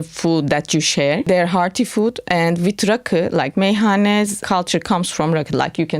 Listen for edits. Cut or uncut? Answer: cut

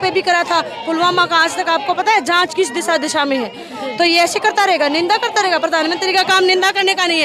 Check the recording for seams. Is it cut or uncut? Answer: uncut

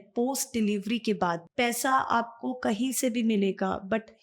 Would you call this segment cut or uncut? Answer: cut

